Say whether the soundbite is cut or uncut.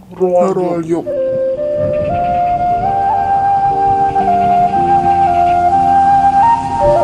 uncut